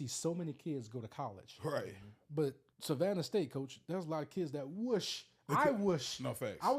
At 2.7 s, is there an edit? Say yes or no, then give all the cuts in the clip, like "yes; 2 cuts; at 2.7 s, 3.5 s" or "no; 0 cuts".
yes; 1 cut; at 2.7 s